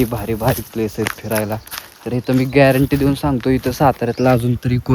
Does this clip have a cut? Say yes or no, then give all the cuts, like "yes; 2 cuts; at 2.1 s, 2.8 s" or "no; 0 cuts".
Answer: no; 0 cuts